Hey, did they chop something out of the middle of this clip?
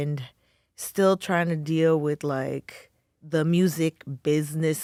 no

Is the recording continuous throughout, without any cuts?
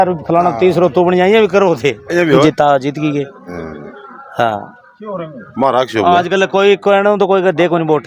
no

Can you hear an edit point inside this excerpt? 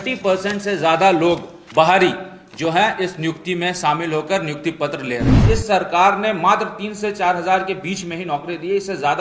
yes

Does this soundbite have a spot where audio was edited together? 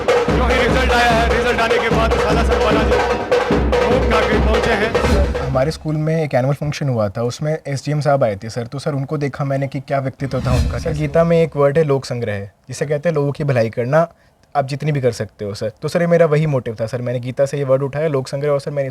yes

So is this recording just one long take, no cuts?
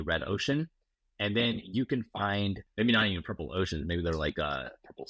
no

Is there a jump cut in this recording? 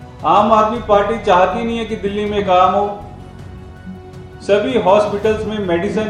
no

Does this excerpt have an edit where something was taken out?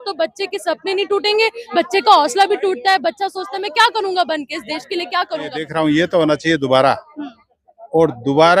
yes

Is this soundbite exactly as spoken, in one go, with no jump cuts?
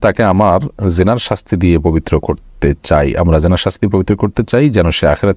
yes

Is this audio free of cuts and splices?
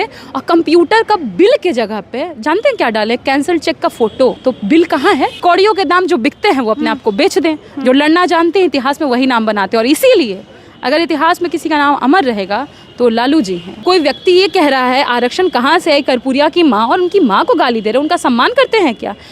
no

